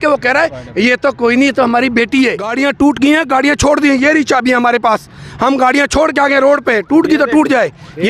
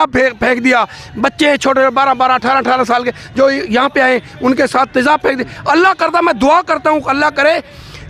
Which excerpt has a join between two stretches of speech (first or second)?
first